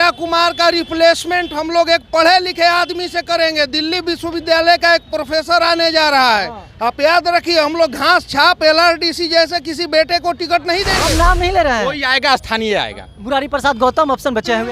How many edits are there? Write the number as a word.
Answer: one